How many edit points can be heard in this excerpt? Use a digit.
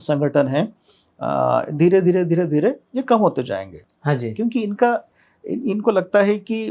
0